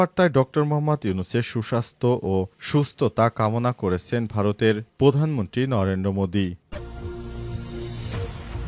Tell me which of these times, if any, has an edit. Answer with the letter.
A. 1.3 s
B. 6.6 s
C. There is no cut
B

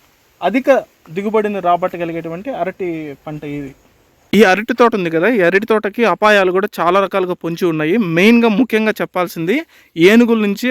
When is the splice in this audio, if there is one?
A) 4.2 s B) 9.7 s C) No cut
A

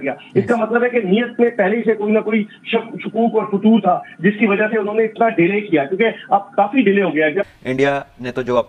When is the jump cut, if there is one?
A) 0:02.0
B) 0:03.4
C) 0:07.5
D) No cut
C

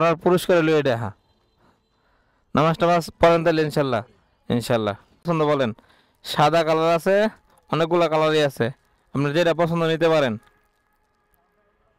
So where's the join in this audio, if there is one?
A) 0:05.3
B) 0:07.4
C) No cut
A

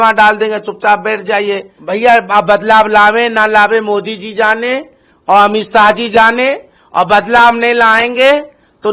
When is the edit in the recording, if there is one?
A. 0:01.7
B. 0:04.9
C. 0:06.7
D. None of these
A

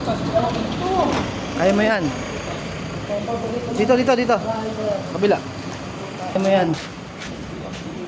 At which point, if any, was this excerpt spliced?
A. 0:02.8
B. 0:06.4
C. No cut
B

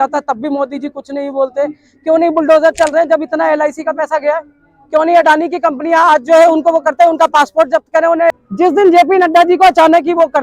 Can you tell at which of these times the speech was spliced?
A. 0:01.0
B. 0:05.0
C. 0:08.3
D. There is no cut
C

